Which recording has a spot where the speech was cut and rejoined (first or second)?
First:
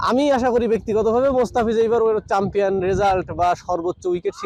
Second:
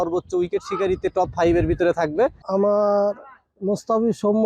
second